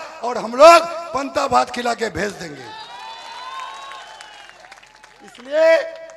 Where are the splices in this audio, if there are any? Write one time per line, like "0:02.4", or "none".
none